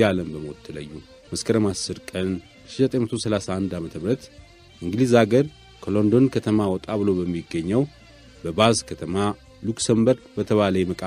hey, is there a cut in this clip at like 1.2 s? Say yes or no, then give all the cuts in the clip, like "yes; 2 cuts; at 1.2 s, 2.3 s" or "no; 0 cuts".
yes; 1 cut; at 1.2 s